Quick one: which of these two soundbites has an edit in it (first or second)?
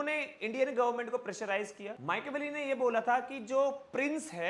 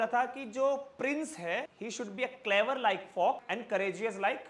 first